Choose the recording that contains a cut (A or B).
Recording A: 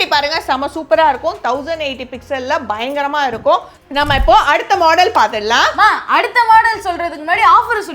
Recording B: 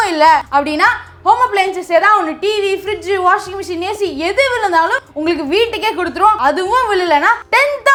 A